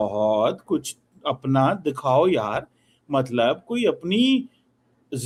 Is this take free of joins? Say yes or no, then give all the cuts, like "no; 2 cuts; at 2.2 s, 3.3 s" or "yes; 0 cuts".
yes; 0 cuts